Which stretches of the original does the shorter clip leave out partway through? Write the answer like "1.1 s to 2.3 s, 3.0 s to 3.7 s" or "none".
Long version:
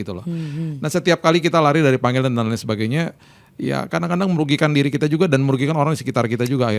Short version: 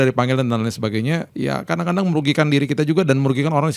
3.1 s to 3.5 s

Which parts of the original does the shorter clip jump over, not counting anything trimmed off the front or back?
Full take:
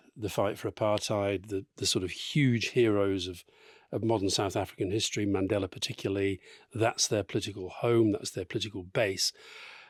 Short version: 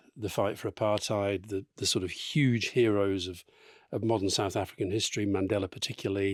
none

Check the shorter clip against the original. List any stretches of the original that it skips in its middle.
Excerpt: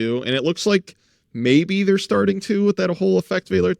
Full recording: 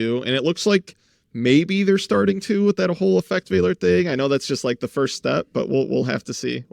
none

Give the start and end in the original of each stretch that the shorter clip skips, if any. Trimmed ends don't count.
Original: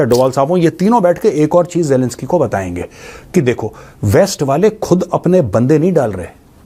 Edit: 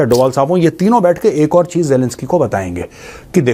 none

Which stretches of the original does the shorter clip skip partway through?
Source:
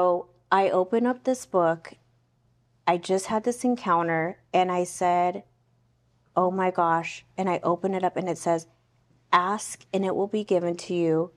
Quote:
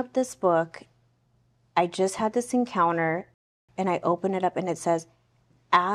4.5 s to 7.0 s

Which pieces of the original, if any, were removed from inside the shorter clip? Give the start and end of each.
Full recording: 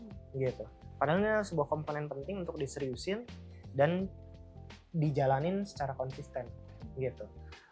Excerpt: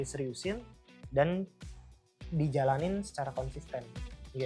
none

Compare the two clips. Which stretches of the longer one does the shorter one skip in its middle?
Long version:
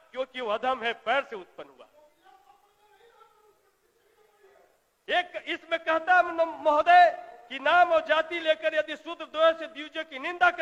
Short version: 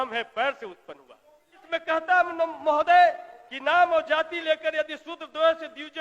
2.3 s to 5.6 s

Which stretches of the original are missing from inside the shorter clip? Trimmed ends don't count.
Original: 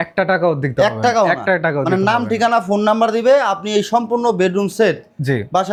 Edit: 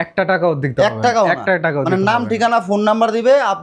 none

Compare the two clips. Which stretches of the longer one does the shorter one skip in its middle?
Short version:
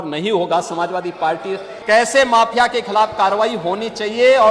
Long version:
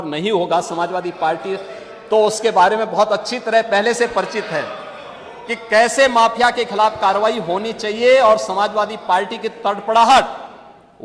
1.7 s to 5.6 s

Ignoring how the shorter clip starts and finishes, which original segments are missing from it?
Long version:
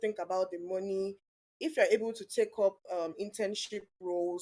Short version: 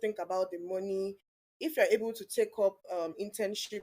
none

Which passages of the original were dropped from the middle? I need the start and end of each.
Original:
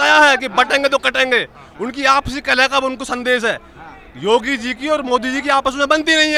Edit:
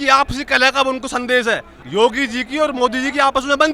3.7 s to 4.0 s

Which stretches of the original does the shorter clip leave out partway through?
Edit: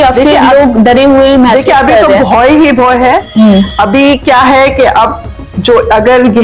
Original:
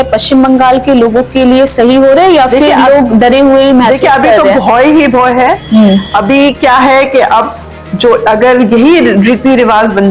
none

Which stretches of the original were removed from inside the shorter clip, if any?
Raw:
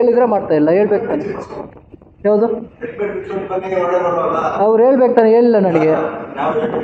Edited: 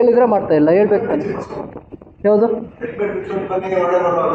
none

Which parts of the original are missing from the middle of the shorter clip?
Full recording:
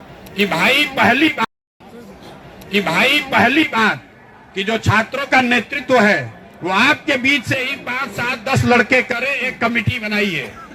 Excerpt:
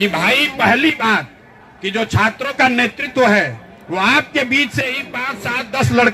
1.3 s to 3.7 s

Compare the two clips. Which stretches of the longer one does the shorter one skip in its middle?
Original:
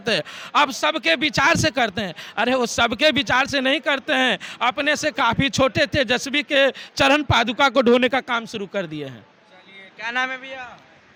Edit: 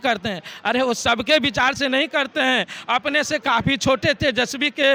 none

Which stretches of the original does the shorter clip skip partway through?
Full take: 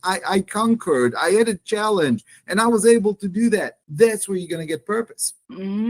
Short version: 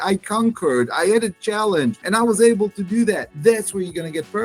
2.3 s to 2.5 s, 3.7 s to 3.8 s

